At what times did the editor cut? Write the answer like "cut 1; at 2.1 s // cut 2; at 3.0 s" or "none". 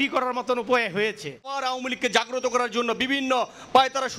cut 1; at 1.5 s